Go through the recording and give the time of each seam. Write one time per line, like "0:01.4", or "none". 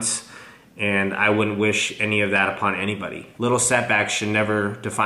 0:03.2